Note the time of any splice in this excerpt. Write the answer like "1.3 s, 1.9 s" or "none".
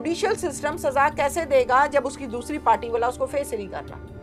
none

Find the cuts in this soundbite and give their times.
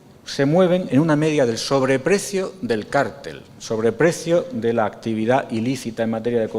1.1 s

